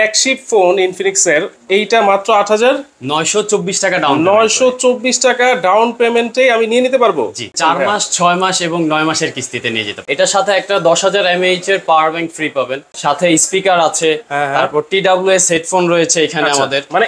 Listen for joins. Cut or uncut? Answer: cut